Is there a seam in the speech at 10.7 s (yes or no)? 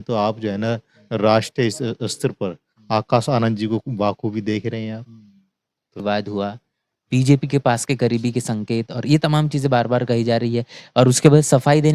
no